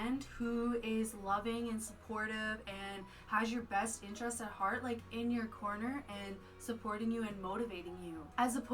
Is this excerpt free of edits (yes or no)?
yes